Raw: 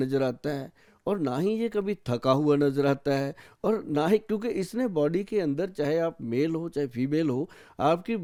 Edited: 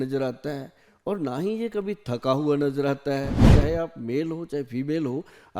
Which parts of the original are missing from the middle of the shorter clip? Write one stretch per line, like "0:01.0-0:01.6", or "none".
0:03.5-0:05.7

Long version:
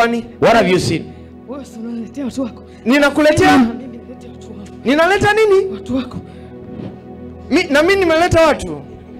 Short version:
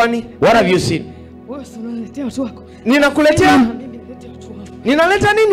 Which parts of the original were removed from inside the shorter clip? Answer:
none

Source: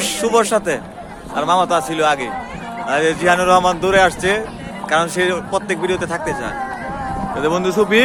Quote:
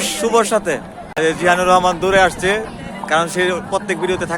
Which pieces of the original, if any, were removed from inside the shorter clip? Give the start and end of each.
0:01.1-0:02.9

